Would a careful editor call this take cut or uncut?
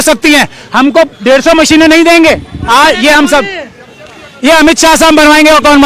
cut